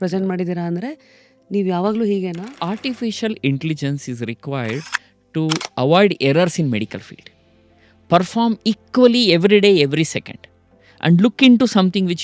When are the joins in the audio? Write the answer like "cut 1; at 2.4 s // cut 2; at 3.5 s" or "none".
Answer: cut 1; at 2.6 s